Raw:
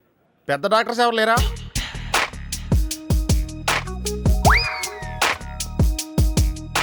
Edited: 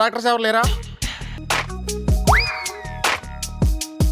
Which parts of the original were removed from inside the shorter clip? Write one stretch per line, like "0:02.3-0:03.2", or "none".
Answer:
0:02.0-0:03.5